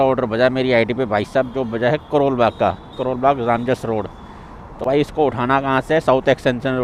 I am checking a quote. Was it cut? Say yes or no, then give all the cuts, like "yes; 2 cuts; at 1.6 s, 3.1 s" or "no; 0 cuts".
no; 0 cuts